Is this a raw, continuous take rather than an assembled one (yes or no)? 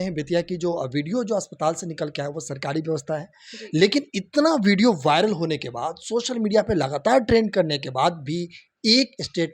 yes